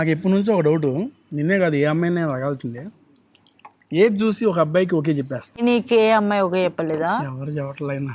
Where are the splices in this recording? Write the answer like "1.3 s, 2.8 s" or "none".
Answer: 5.5 s